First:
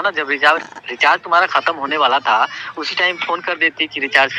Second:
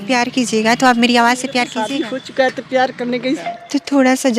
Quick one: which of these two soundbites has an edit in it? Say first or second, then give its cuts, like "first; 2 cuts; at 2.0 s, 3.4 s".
second; 2 cuts; at 1.7 s, 3.4 s